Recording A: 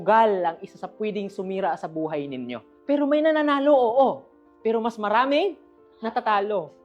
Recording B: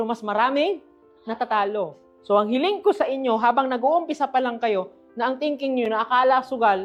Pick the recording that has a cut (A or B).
A